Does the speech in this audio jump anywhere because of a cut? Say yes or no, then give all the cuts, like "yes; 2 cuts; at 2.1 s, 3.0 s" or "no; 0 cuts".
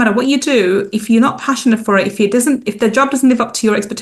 no; 0 cuts